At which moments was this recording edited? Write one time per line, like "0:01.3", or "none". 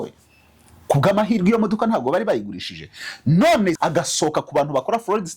0:03.8